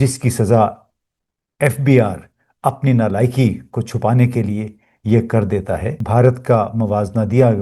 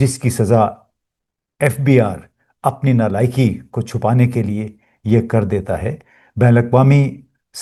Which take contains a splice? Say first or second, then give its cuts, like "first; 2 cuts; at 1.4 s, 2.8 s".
first; 1 cut; at 6.0 s